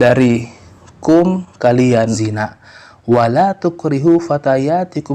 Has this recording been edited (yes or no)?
yes